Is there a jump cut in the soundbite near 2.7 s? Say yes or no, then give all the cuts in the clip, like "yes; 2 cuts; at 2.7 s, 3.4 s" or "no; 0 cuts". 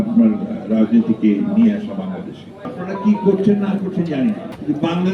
yes; 1 cut; at 2.7 s